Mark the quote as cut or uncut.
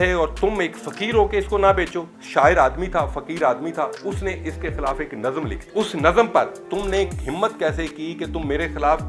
cut